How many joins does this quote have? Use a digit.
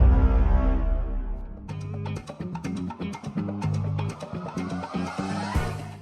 1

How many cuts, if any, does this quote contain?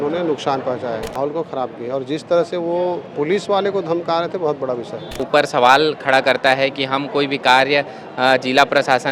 2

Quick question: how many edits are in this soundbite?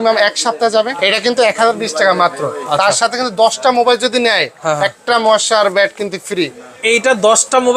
1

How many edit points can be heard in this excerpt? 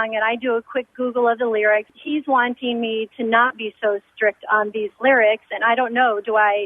1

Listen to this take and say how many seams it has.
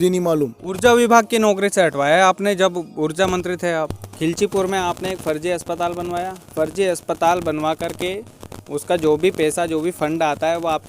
1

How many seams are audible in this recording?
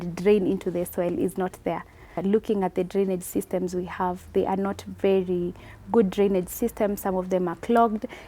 1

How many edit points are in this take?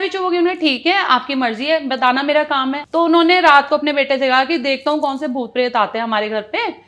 1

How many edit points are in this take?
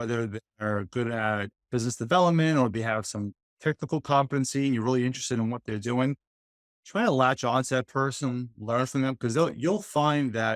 1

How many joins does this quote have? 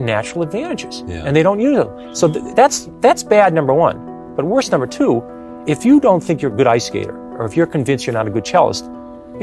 0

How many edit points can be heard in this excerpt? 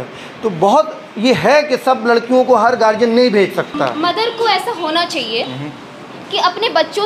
1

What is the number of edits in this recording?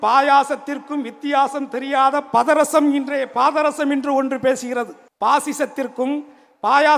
1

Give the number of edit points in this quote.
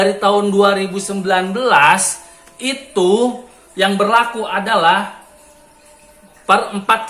0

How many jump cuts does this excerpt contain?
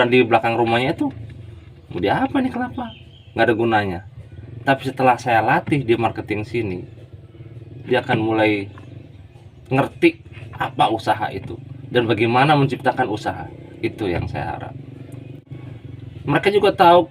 1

